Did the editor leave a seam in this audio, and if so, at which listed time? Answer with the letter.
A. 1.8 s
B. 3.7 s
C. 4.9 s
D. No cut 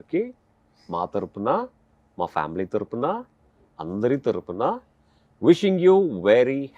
D